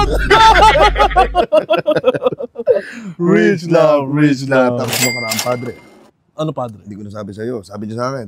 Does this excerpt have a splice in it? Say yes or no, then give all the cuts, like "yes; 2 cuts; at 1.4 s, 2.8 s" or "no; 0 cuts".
no; 0 cuts